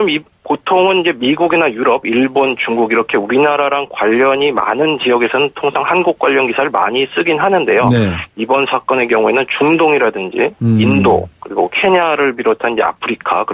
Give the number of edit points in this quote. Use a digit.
1